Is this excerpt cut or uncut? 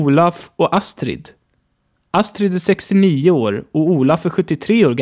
cut